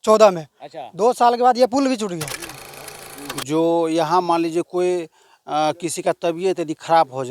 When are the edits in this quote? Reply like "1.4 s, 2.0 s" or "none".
2.8 s